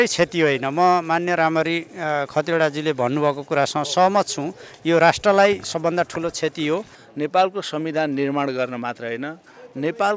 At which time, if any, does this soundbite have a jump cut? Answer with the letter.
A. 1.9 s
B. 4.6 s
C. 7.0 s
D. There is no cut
C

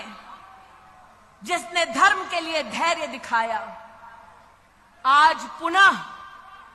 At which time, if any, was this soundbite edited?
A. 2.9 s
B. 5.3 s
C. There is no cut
C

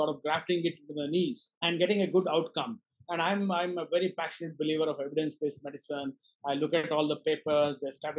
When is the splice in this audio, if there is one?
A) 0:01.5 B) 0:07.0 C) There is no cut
A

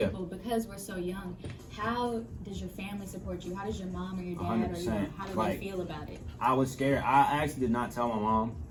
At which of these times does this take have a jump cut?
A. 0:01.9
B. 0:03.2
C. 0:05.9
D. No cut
D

